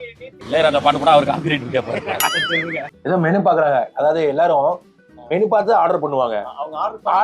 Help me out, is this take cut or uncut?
cut